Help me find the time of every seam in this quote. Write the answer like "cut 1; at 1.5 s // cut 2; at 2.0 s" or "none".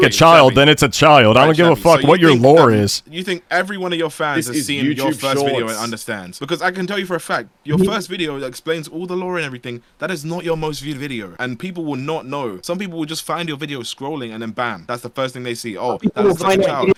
none